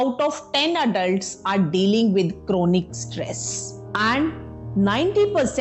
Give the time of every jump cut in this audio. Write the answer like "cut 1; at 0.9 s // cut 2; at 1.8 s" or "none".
cut 1; at 3.7 s